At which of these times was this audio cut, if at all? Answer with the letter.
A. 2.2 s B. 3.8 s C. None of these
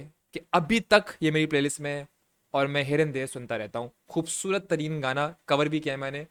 C